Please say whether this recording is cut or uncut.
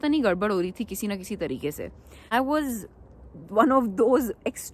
cut